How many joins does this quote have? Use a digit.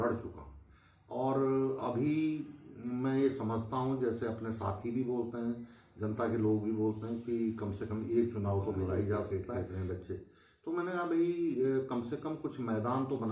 1